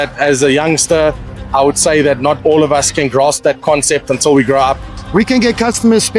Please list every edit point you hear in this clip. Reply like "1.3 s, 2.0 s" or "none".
4.9 s